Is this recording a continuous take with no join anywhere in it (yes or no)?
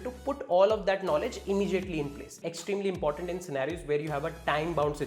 no